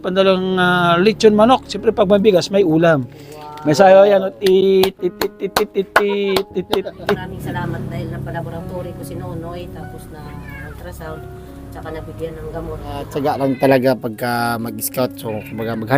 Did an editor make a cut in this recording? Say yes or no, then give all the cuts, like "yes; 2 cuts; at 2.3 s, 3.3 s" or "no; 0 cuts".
yes; 2 cuts; at 7.3 s, 13.1 s